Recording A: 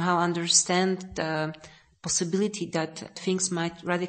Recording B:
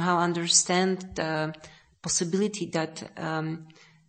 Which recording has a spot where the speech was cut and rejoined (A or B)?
A